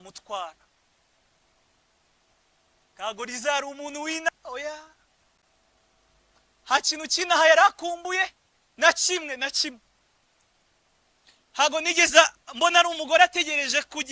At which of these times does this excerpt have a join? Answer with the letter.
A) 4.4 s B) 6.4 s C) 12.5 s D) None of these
D